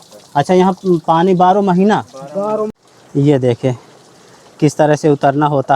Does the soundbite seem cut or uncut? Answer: cut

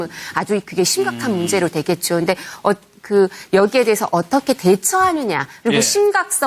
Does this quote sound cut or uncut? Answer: uncut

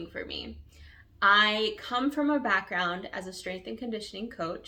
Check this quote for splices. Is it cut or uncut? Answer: uncut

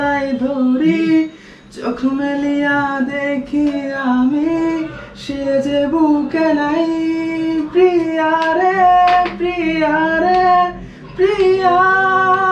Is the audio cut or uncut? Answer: uncut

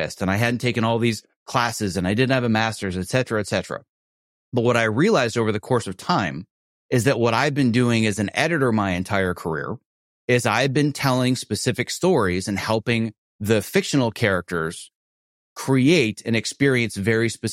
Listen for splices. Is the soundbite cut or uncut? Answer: uncut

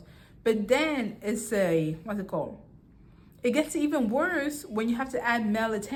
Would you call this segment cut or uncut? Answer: uncut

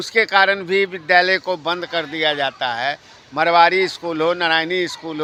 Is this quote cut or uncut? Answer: uncut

